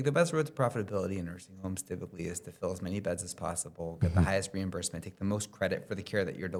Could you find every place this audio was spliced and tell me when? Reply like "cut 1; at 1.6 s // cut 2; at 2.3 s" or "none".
none